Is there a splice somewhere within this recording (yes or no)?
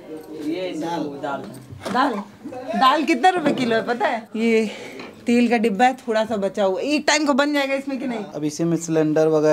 yes